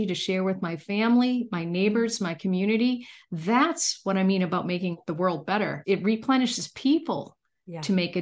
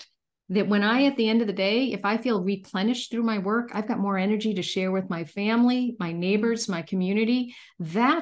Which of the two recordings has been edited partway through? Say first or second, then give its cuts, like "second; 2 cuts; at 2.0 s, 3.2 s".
first; 2 cuts; at 5.0 s, 5.8 s